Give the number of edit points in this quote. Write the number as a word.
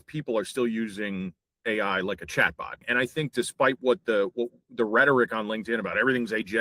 one